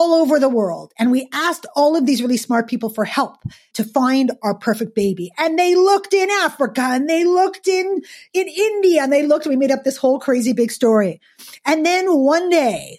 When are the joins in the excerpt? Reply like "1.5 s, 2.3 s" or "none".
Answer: 3.7 s, 8.3 s